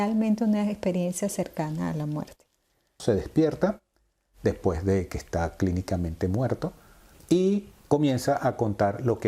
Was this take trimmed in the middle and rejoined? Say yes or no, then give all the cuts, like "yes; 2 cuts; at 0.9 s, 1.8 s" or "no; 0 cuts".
yes; 2 cuts; at 2.9 s, 7.1 s